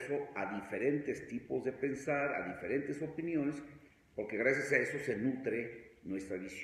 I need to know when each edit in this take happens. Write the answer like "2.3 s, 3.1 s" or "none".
1.0 s